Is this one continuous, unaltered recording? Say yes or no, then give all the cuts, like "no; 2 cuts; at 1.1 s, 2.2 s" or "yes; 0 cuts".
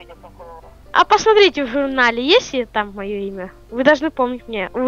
yes; 0 cuts